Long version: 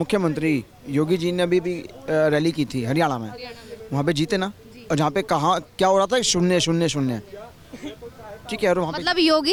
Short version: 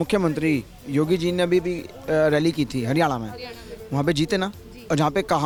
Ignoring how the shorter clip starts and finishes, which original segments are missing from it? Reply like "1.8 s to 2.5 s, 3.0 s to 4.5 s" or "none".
none